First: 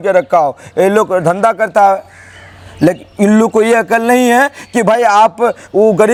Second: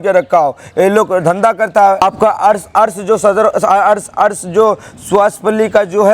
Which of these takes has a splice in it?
second; 1 cut; at 2.0 s

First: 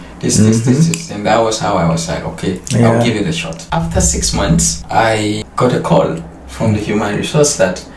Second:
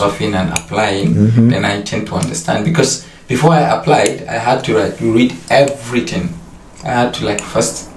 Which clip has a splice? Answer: first; 1 cut; at 3.6 s

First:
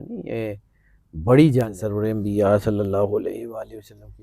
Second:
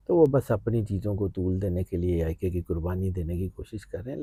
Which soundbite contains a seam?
first; 1 cut; at 1.8 s

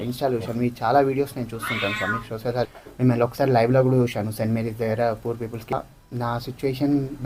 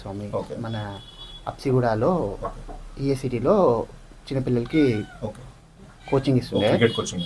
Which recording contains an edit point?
first; 2 cuts; at 2.8 s, 5.7 s

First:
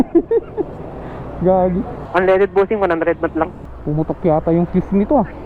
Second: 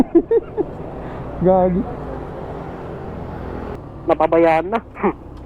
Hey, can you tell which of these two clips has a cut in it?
first; 2 cuts; at 2.0 s, 3.7 s

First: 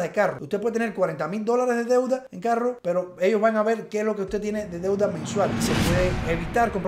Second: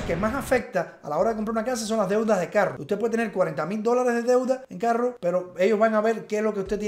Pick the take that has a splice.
first; 1 cut; at 5.6 s

